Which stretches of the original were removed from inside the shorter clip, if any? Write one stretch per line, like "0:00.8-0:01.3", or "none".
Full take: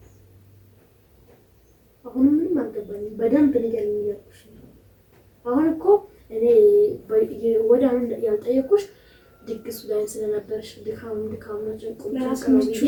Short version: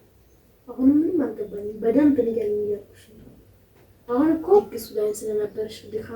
0:06.2-0:09.7